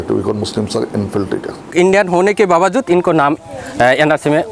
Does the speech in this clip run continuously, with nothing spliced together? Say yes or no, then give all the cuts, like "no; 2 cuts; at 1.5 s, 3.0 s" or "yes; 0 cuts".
no; 1 cut; at 1.7 s